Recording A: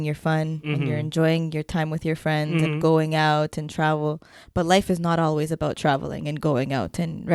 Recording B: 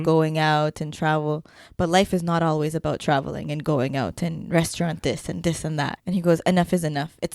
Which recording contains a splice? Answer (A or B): B